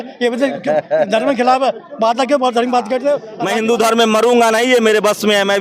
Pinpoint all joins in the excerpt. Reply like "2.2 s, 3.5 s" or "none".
3.3 s